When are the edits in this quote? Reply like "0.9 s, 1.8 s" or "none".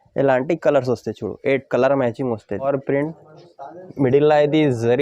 2.7 s